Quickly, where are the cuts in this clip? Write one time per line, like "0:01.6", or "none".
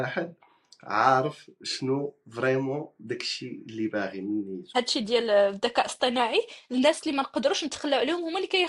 0:04.6